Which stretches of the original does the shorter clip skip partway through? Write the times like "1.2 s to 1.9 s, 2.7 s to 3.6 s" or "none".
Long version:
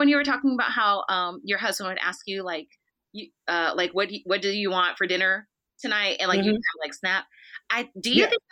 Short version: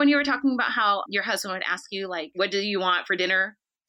1.1 s to 1.4 s, 2.6 s to 4.2 s